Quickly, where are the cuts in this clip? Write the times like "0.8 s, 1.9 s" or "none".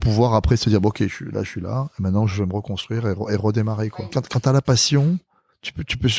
3.9 s